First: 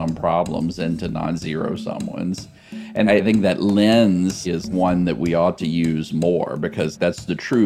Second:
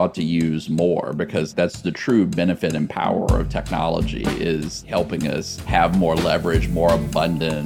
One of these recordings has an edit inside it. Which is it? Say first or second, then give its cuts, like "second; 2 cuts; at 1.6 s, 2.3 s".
second; 1 cut; at 5.5 s